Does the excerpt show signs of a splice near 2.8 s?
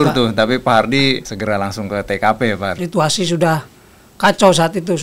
yes; 2 cuts; at 1.3 s, 2.8 s

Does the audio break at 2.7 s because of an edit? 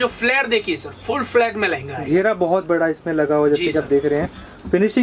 no; 0 cuts

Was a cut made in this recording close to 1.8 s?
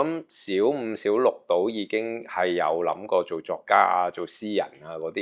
no; 0 cuts

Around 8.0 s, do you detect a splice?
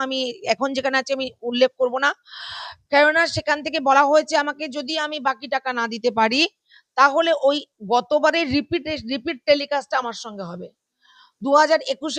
no; 0 cuts

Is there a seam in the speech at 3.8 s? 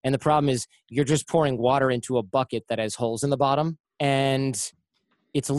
yes; 1 cut; at 3.8 s

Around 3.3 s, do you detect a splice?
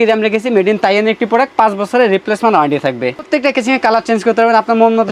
yes; 1 cut; at 3.3 s

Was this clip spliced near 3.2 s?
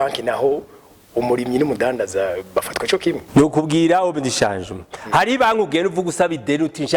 yes; 1 cut; at 3.2 s

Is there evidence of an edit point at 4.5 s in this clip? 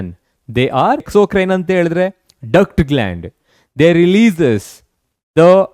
no; 1 cut; at 1.1 s

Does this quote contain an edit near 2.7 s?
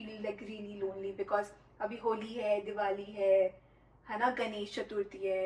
no; 0 cuts

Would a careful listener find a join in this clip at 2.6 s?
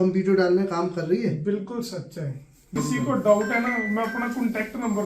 yes; 1 cut; at 2.6 s

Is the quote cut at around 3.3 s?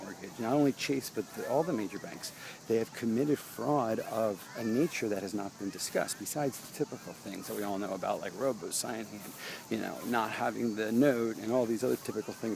yes; 1 cut; at 3.3 s

